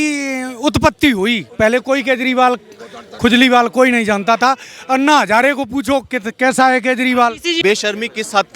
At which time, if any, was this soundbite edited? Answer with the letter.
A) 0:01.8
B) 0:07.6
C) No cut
B